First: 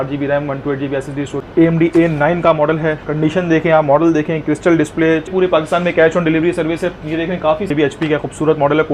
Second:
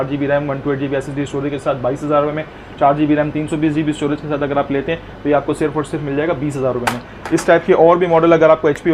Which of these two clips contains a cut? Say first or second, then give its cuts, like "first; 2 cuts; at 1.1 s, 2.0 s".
first; 3 cuts; at 1.3 s, 5.3 s, 7.7 s